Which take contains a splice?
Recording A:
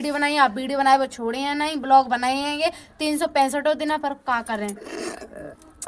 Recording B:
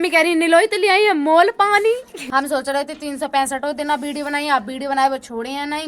B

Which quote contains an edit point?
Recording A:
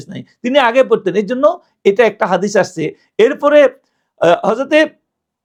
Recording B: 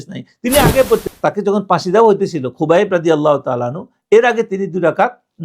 B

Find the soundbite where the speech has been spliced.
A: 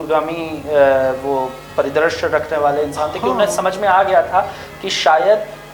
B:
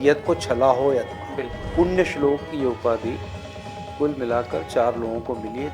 B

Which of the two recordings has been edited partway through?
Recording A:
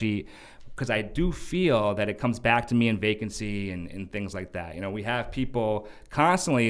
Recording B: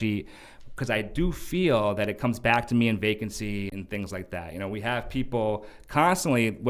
B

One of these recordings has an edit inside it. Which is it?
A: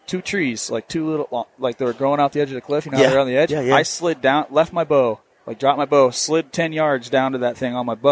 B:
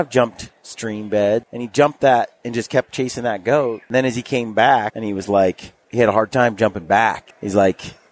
B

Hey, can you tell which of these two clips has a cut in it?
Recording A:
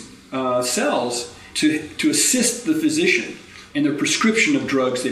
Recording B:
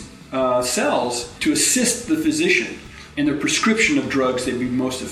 B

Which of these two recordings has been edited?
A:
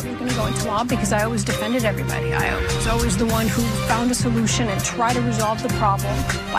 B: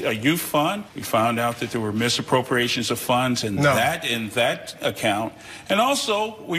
B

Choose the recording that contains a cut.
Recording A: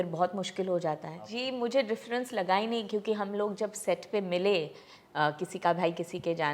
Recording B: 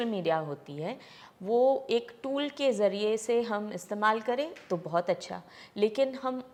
A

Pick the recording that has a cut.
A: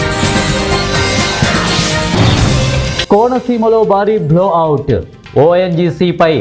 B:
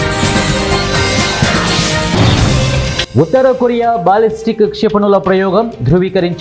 B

